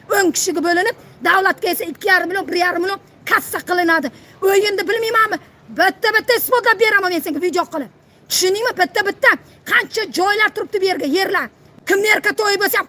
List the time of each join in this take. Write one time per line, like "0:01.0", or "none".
0:11.6